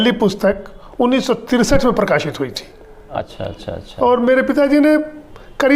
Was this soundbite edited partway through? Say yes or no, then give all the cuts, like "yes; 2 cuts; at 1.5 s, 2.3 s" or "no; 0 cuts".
yes; 1 cut; at 3.2 s